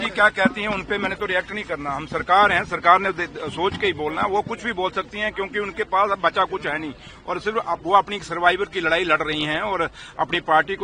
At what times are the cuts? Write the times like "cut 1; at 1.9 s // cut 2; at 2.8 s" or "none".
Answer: none

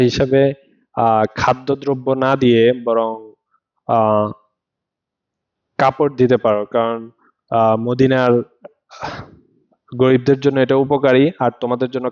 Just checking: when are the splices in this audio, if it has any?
none

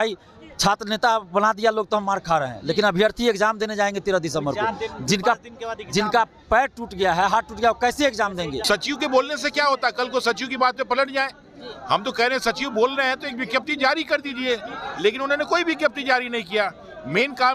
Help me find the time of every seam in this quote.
cut 1; at 8.6 s

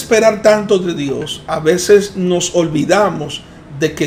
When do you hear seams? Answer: none

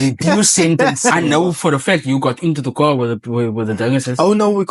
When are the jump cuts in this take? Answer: cut 1; at 1.1 s

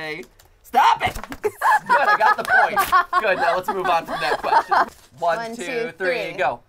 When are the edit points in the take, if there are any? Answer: cut 1; at 4.9 s

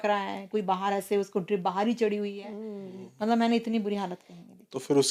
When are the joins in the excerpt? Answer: none

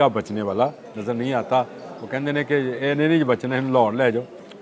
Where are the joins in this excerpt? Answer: none

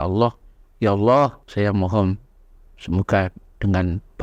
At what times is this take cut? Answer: cut 1; at 1.4 s

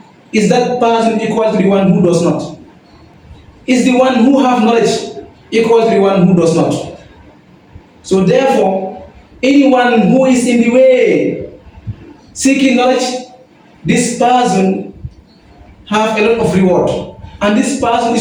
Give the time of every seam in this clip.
none

